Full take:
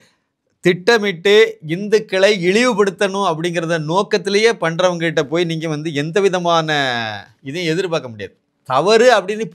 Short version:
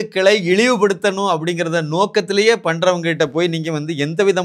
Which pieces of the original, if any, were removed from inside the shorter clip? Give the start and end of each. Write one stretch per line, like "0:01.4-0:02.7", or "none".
none